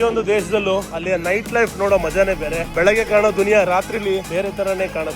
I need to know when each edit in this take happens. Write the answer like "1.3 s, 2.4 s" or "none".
0.9 s, 2.7 s, 4.3 s